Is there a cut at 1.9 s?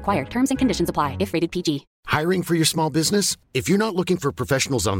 yes; 1 cut; at 1.9 s

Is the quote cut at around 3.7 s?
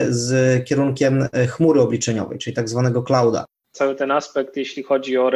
yes; 1 cut; at 3.7 s

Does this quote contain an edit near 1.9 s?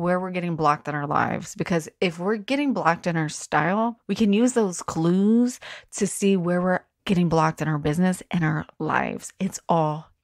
no; 2 cuts; at 4.0 s, 6.9 s

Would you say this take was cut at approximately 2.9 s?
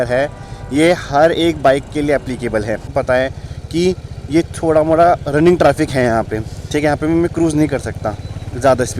yes; 1 cut; at 2.9 s

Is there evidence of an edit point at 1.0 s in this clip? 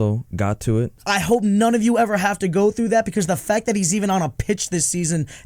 yes; 1 cut; at 1.0 s

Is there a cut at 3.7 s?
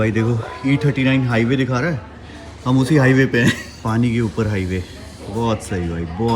yes; 1 cut; at 3.7 s

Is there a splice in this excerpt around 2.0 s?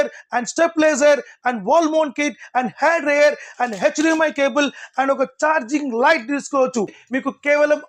no; 1 cut; at 7.0 s

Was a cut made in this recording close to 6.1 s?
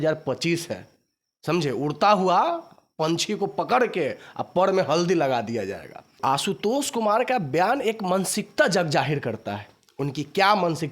yes; 1 cut; at 6.1 s

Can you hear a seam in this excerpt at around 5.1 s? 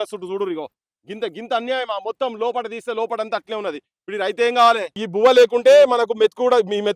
yes; 1 cut; at 5.1 s

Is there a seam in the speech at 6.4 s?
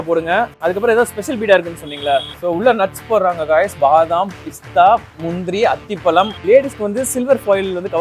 yes; 2 cuts; at 2.3 s, 6.4 s

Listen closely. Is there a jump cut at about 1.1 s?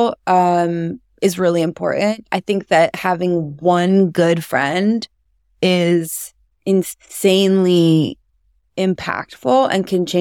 no; 0 cuts

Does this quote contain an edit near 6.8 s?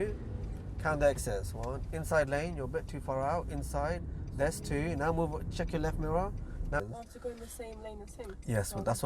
yes; 1 cut; at 6.8 s

